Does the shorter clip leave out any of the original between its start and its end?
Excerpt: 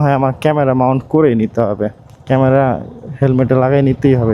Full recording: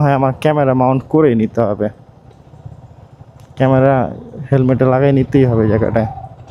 yes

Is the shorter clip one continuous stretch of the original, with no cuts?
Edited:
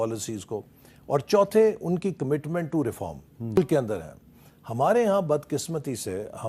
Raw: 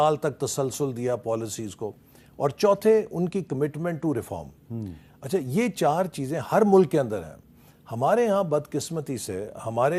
no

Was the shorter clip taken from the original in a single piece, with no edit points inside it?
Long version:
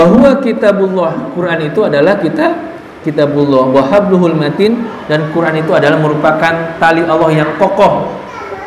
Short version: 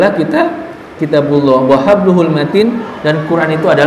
yes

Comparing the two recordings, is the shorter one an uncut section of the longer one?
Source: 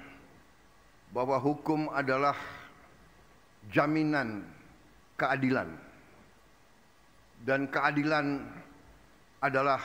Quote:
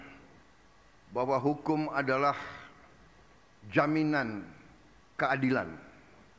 yes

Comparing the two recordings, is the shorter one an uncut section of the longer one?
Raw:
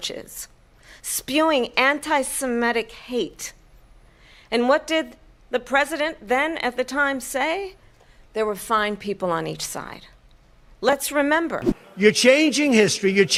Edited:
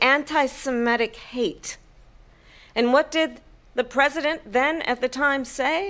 yes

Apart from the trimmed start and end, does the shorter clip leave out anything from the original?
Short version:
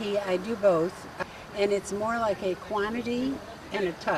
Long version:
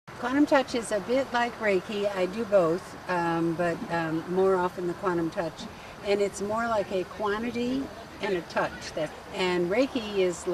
yes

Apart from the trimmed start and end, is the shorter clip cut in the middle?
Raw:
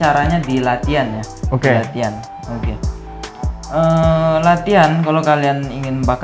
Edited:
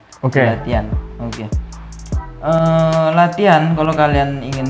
no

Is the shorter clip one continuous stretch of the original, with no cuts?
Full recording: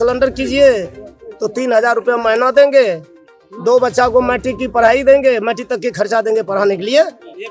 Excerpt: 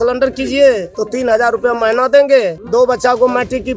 no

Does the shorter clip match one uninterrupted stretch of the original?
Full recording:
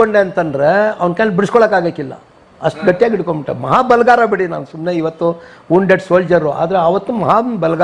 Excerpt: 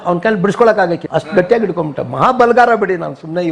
no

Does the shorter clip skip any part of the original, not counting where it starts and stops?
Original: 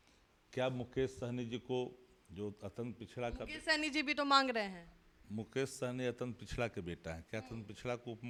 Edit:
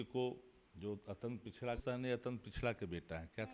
yes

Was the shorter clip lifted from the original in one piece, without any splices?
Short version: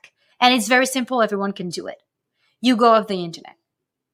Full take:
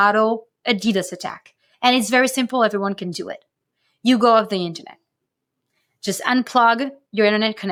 yes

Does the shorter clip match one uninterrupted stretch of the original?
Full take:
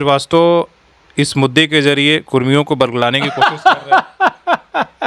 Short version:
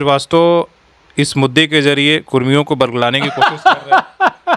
yes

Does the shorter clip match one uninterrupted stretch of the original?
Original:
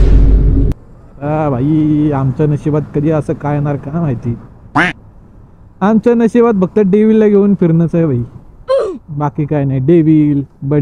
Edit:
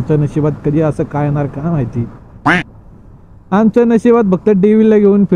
yes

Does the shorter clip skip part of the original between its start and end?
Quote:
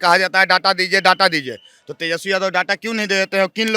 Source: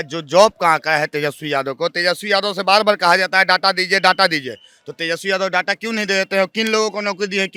no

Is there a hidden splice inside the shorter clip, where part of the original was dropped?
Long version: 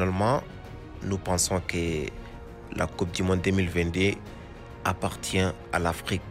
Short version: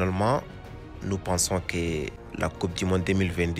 yes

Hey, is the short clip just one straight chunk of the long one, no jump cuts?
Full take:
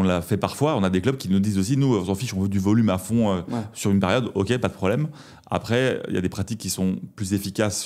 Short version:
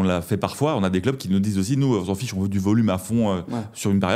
yes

